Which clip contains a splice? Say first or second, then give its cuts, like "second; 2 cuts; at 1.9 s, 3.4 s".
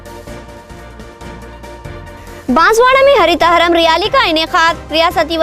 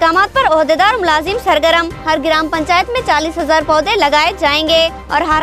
first; 1 cut; at 0.9 s